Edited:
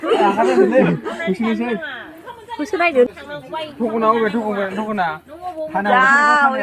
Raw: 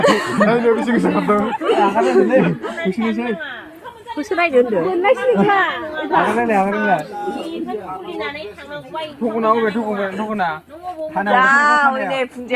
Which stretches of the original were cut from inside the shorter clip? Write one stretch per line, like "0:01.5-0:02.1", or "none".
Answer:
0:04.7-0:08.5